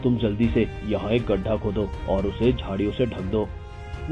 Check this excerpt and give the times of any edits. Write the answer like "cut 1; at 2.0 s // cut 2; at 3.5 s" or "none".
none